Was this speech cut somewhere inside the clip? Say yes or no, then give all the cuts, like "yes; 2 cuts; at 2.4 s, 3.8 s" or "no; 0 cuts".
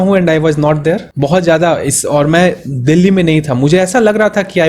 yes; 1 cut; at 1.1 s